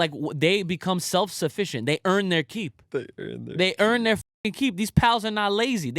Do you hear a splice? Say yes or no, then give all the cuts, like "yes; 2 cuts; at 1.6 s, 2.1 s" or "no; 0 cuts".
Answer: yes; 1 cut; at 2.8 s